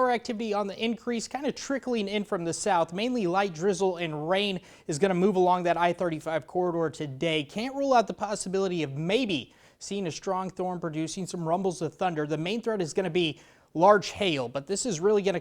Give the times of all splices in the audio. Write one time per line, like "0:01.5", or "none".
none